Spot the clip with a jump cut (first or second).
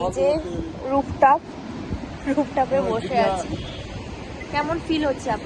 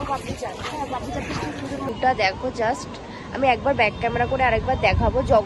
second